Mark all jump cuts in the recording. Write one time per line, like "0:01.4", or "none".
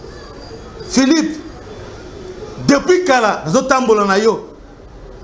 none